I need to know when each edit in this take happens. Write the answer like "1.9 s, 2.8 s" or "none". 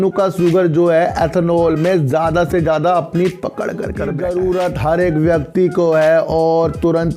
4.1 s